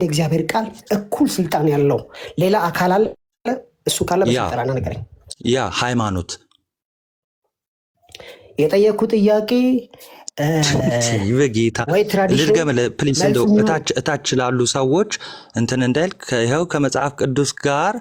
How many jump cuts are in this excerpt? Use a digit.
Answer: 0